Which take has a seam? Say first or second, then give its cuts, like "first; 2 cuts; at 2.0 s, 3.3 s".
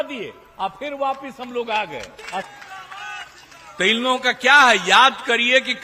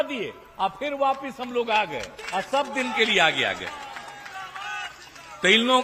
first; 1 cut; at 2.5 s